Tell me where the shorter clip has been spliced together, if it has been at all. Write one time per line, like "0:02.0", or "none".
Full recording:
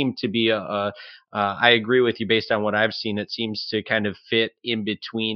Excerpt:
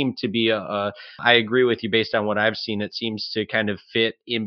0:01.2